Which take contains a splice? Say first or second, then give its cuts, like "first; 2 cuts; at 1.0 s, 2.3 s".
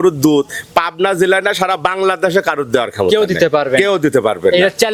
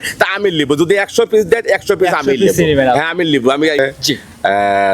second; 1 cut; at 3.8 s